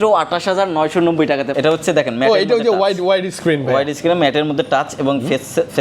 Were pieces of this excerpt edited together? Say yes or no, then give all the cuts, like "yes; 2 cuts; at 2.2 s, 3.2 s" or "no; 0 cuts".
yes; 1 cut; at 1.5 s